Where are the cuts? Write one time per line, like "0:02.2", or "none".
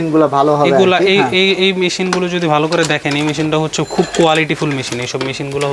none